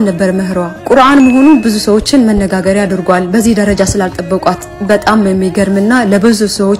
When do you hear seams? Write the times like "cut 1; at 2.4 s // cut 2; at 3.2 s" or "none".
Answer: none